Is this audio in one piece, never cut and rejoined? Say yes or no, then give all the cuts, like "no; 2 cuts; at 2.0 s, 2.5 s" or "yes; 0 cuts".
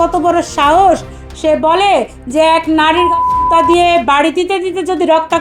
yes; 0 cuts